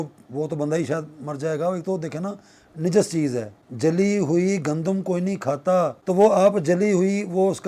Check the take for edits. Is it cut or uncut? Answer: cut